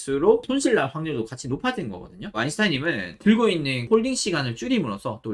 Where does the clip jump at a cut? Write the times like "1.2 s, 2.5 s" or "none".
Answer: 2.3 s, 3.8 s

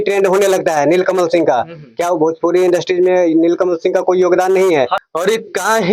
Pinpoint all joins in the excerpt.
5.0 s

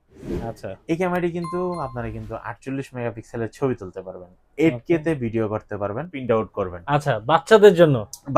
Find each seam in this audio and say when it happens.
6.2 s

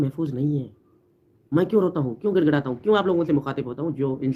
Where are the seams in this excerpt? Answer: none

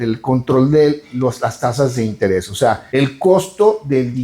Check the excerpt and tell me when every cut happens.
2.8 s

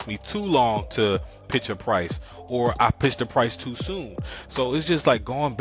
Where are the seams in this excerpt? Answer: 1.5 s

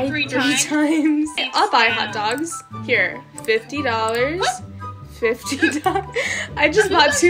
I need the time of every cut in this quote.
none

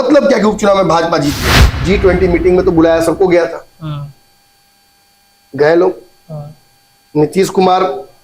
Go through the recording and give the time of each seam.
1.7 s

